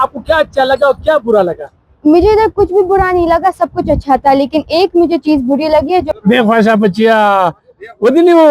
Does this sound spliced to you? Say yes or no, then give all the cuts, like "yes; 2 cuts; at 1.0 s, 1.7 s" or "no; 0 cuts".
yes; 1 cut; at 6.1 s